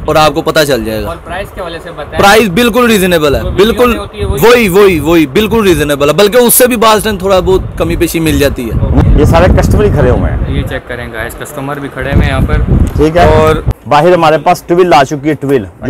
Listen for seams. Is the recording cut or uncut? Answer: uncut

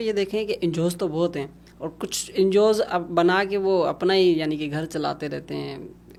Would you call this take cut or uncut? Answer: uncut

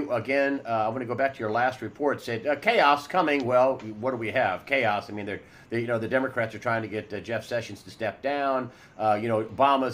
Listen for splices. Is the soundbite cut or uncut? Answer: uncut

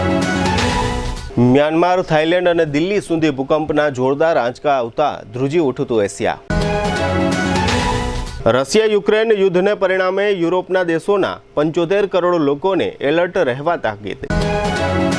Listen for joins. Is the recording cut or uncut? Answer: cut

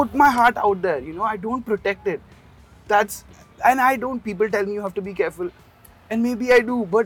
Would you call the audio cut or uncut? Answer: uncut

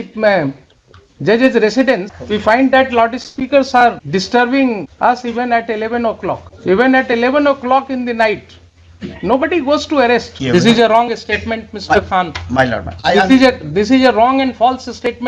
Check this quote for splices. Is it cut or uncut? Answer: cut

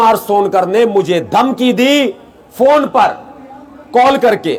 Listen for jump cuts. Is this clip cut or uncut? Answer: uncut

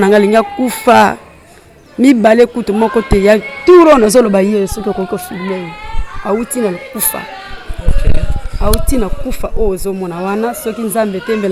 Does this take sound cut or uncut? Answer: uncut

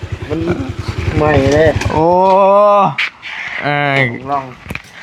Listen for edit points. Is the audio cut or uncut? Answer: uncut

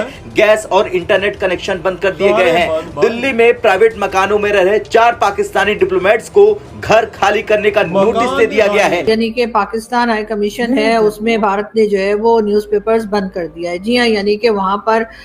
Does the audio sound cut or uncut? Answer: cut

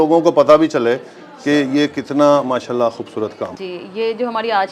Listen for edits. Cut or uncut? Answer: cut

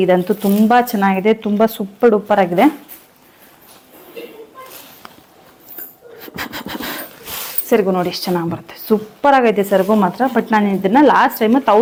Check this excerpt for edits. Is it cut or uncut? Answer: uncut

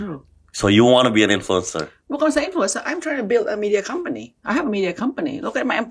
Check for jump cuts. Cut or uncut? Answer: uncut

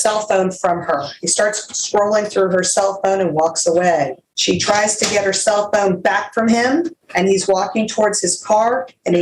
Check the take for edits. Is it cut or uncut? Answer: cut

